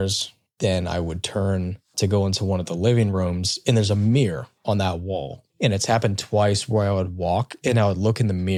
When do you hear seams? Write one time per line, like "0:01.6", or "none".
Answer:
none